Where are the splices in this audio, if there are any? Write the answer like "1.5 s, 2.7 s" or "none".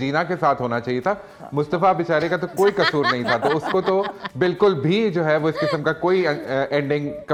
none